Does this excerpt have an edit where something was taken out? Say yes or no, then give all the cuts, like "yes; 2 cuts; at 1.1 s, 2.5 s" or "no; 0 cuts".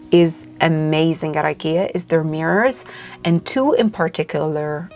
no; 0 cuts